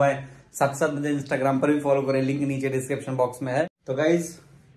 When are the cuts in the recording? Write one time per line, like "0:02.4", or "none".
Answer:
0:03.8